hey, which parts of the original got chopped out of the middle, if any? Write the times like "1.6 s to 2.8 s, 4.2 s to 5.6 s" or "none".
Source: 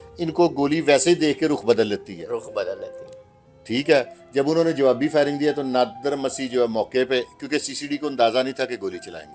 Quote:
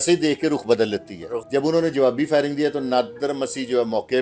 2.3 s to 4.2 s